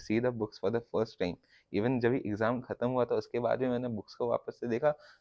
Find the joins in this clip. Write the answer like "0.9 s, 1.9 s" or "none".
none